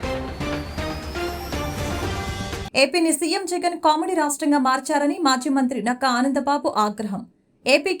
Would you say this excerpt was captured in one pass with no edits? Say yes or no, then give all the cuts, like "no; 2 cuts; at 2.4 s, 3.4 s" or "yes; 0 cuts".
no; 1 cut; at 2.6 s